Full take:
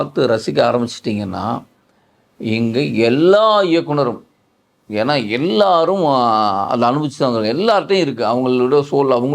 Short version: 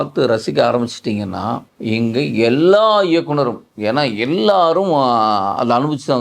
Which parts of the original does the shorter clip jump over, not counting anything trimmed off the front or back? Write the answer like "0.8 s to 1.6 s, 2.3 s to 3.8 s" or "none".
1.7 s to 2.3 s, 4.3 s to 4.8 s